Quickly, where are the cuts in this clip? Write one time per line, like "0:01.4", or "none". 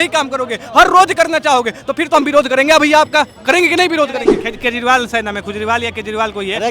0:04.3